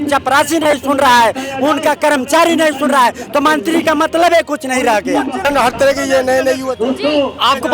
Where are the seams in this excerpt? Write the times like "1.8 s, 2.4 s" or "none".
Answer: 5.4 s